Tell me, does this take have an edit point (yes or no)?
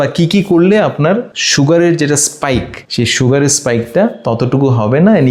no